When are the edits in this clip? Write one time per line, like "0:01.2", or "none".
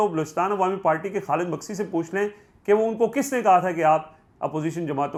none